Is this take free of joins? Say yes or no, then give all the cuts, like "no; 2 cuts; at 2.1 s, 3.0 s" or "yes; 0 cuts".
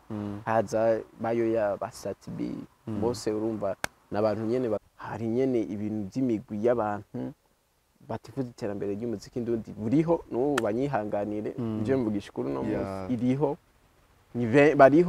no; 1 cut; at 4.8 s